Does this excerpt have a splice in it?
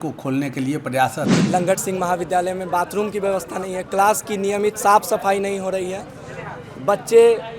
yes; 1 cut; at 1.3 s

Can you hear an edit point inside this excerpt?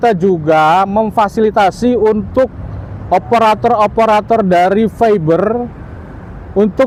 no; 0 cuts

